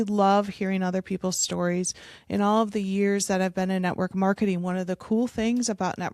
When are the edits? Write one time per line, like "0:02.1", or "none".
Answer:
none